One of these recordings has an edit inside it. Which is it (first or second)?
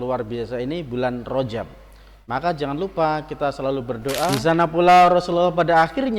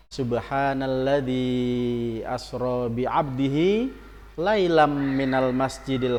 first